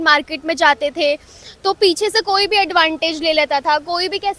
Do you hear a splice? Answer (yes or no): no